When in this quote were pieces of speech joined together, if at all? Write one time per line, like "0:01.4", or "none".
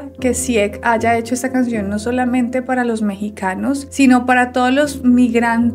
none